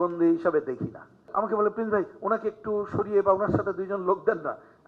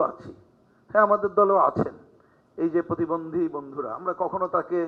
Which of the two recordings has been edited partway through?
first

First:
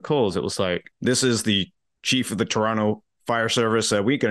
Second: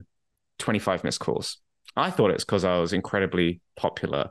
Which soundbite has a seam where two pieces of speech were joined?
first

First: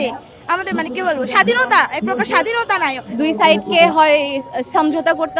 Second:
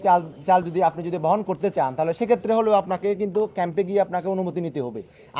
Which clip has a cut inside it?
first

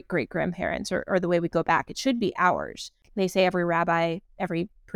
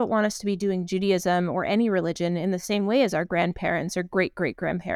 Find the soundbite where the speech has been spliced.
first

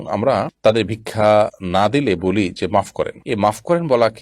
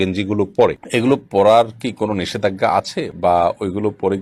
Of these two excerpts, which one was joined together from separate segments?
first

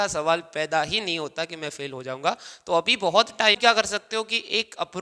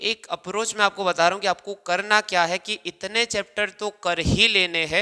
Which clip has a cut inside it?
first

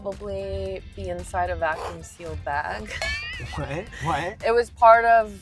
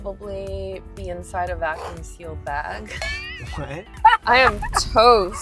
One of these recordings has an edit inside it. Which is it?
second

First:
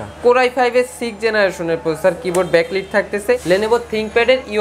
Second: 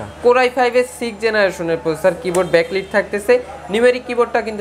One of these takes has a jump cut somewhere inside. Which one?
first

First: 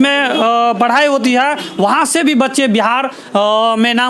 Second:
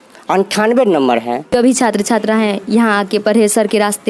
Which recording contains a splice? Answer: second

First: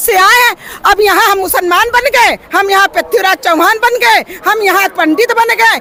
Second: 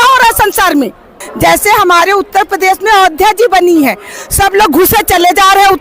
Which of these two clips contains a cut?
second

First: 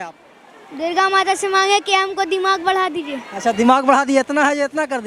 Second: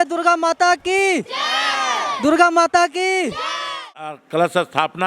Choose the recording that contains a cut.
second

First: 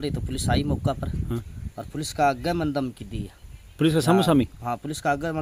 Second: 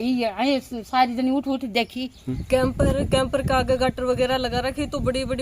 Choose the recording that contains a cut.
second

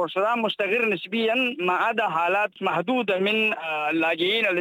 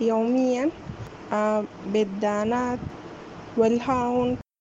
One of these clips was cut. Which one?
first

